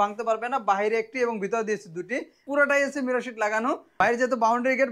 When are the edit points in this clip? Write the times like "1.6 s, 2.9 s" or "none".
2.4 s, 3.9 s